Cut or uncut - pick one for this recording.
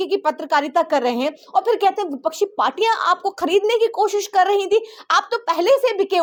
uncut